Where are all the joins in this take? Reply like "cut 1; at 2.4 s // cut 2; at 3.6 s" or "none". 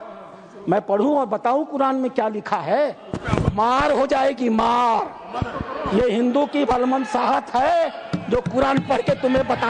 none